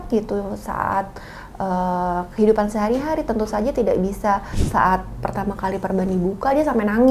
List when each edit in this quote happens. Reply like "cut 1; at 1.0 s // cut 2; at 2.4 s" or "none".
cut 1; at 4.5 s